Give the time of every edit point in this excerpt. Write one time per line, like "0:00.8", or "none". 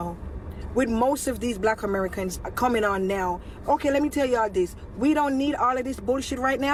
none